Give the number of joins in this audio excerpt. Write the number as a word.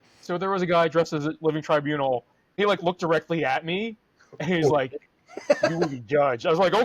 one